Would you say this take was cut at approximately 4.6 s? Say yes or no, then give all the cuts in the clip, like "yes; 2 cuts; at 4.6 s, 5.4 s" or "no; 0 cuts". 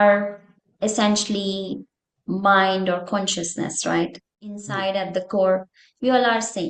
yes; 1 cut; at 4.6 s